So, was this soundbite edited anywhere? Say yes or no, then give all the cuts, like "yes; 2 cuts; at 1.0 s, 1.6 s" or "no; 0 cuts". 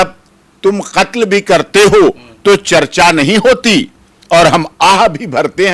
no; 0 cuts